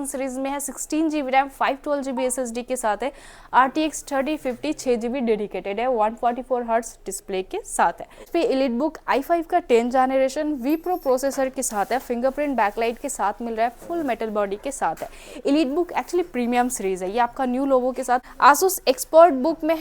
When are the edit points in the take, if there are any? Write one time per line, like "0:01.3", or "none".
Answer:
0:08.3
0:18.3